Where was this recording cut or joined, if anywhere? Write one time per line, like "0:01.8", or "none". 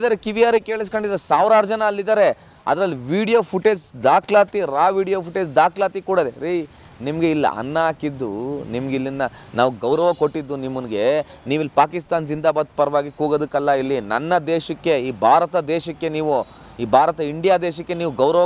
none